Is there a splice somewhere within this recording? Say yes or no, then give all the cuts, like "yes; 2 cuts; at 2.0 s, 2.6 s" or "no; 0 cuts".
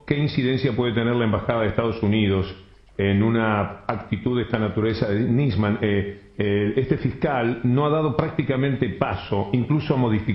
no; 0 cuts